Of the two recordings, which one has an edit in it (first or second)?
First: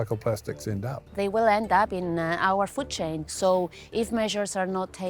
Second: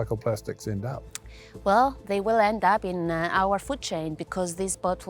first